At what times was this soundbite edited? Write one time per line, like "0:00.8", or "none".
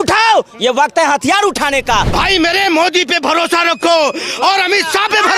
0:02.1

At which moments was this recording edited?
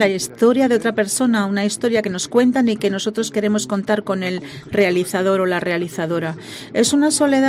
none

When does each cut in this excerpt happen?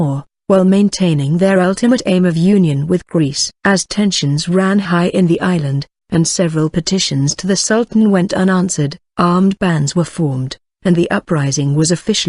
none

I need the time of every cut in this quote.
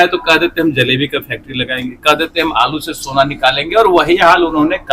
none

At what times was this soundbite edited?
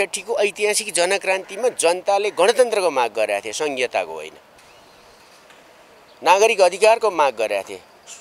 none

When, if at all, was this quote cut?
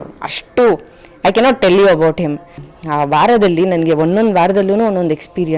0:02.6

